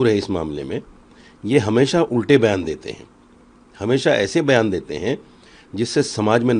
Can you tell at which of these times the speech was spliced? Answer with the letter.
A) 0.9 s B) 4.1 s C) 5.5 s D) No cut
D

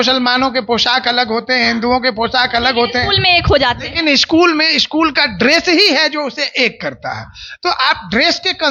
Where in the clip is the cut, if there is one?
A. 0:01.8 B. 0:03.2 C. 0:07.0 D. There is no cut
D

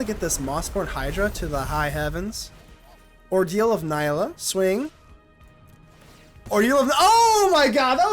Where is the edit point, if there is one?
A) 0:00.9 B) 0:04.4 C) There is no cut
B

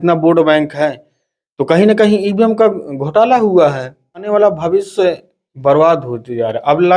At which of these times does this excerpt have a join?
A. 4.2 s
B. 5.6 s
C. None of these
A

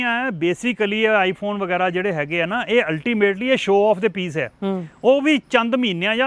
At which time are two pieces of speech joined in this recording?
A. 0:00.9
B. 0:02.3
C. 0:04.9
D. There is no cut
D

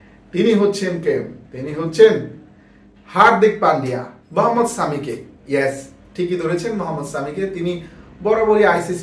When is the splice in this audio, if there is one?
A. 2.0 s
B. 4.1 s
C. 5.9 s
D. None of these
B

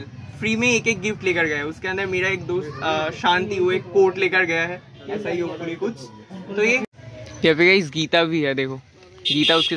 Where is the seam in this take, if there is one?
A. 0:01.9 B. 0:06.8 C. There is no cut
B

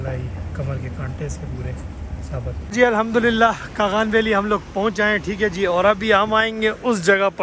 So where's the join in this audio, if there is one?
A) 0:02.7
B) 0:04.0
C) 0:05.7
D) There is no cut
A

